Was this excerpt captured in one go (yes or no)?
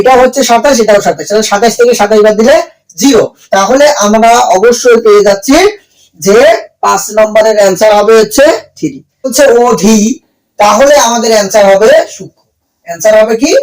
no